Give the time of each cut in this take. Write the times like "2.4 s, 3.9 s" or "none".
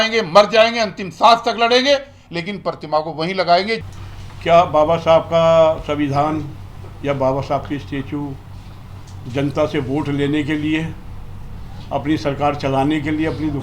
none